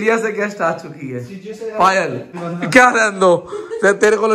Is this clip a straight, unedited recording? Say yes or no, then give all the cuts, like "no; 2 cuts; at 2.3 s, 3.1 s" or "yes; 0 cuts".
no; 1 cut; at 2.4 s